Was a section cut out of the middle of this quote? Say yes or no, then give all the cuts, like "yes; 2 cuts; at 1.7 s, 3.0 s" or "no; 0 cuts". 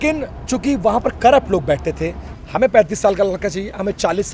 yes; 1 cut; at 2.2 s